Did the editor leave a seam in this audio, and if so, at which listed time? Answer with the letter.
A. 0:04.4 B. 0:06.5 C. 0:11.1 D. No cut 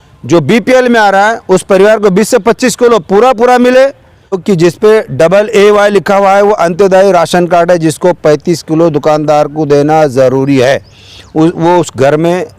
A